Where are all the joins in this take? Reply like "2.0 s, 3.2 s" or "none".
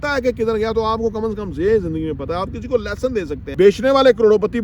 3.4 s

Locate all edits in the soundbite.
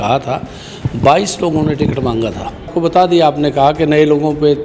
2.7 s

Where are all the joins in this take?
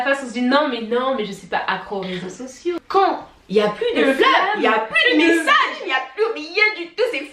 2.8 s

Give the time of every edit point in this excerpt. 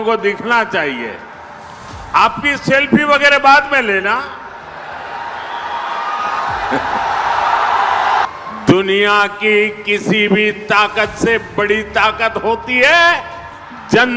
4.7 s, 8.2 s

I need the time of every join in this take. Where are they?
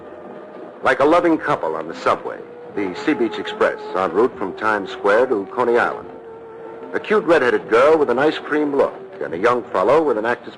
none

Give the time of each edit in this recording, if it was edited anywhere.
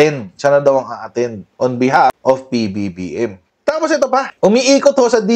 3.4 s

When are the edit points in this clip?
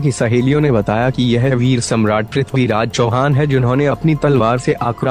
4.2 s

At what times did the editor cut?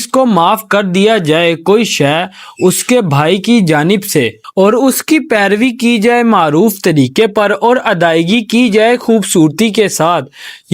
4.4 s

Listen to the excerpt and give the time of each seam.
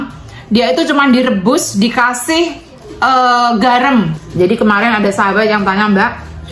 4.2 s

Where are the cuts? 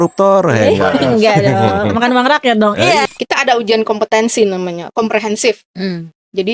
3.0 s

